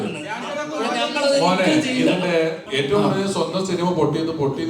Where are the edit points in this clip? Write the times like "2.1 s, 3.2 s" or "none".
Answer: 2.6 s